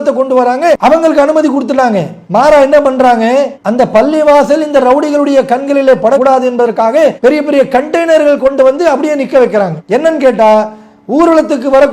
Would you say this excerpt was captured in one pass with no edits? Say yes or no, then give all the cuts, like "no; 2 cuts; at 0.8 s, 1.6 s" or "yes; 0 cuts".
yes; 0 cuts